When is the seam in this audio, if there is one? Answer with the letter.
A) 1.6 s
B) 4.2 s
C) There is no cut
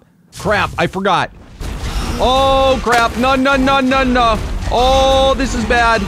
A